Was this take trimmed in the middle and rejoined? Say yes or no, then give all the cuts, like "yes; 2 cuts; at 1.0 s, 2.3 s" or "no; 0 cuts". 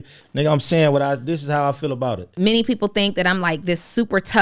yes; 1 cut; at 2.3 s